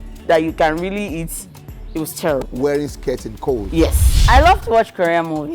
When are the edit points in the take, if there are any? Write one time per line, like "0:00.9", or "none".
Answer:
0:04.1